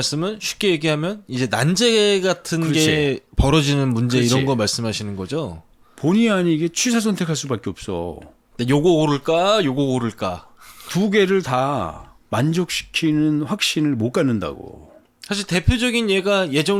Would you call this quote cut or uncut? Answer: uncut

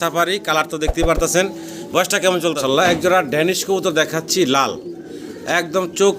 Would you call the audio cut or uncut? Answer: cut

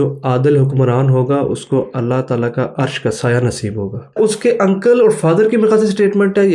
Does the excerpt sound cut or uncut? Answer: cut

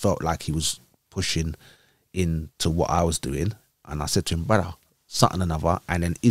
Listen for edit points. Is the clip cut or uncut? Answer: uncut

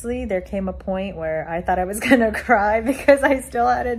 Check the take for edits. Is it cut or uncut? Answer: uncut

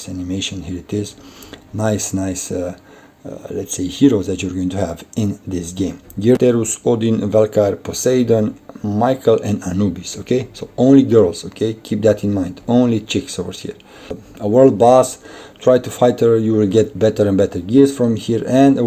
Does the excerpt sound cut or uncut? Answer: cut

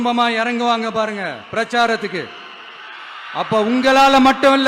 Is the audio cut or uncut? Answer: uncut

